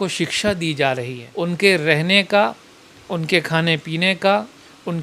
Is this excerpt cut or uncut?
cut